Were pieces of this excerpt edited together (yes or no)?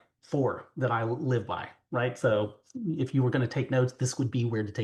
no